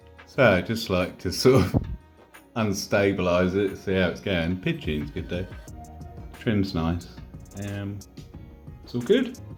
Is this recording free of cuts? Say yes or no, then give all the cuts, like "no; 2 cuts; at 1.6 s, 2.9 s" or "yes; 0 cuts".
yes; 0 cuts